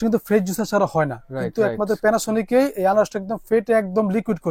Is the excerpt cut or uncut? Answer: uncut